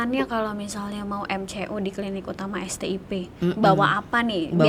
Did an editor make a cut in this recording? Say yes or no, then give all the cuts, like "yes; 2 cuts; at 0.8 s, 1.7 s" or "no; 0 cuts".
no; 0 cuts